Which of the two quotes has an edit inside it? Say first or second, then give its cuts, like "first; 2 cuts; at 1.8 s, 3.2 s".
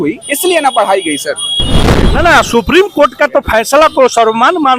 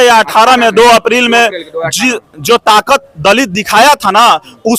first; 1 cut; at 1.8 s